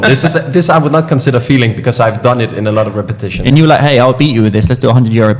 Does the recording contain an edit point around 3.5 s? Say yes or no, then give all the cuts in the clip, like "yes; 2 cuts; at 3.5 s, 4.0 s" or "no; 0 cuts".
yes; 1 cut; at 3.5 s